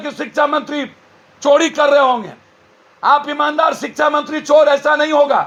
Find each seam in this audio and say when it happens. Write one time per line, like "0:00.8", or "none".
none